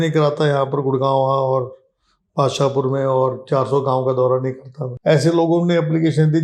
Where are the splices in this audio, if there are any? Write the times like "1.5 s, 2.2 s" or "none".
4.8 s